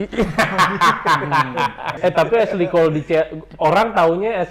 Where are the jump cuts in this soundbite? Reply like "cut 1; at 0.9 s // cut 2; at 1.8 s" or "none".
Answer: cut 1; at 1.9 s